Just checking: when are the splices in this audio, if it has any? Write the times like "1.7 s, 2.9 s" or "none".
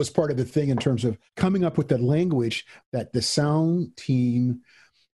1.2 s